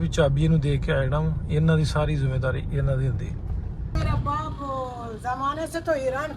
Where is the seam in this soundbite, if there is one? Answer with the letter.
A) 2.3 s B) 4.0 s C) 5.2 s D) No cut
B